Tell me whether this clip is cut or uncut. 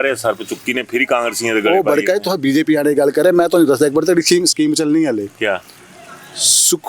uncut